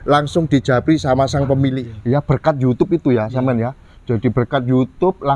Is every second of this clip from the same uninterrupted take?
no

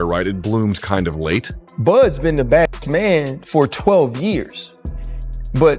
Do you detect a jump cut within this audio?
yes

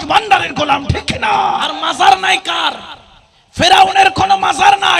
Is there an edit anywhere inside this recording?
yes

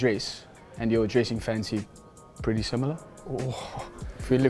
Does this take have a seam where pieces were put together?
yes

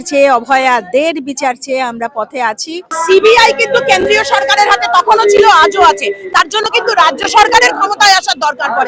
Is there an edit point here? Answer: yes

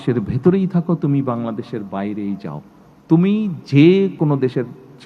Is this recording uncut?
no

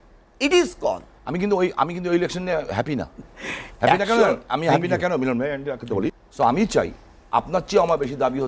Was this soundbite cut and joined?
yes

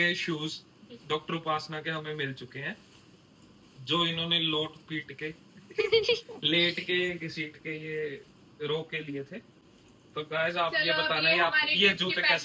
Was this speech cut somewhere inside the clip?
no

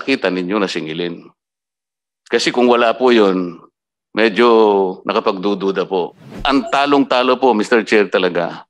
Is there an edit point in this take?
yes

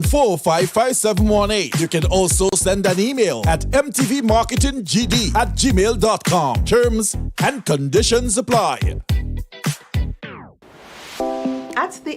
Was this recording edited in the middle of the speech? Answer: yes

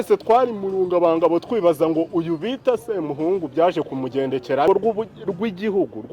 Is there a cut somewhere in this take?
yes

